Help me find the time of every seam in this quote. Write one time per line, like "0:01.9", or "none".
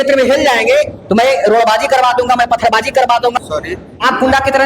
0:03.4